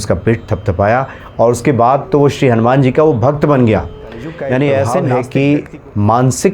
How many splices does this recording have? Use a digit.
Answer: 1